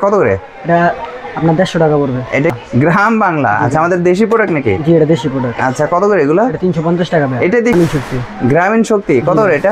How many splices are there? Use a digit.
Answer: 2